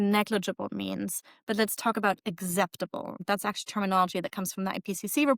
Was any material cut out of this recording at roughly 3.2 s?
yes; 1 cut; at 3.2 s

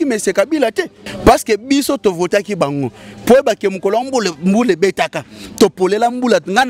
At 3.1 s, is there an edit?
no; 1 cut; at 1.0 s

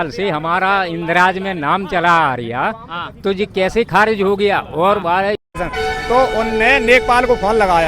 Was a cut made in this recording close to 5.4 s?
yes; 1 cut; at 5.4 s

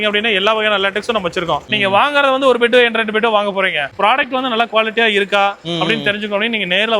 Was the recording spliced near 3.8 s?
yes; 1 cut; at 3.8 s

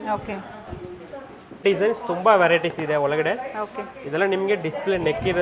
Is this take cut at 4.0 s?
no; 1 cut; at 1.6 s

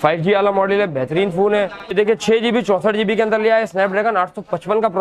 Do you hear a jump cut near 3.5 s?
no; 1 cut; at 1.9 s

